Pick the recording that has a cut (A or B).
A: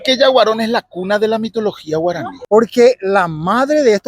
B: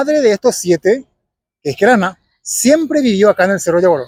A